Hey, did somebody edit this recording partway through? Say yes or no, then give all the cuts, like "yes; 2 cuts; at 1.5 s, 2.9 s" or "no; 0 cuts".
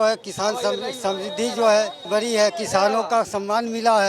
yes; 1 cut; at 2.0 s